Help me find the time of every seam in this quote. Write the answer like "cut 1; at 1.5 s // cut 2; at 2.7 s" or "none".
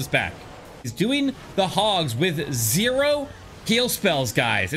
cut 1; at 0.9 s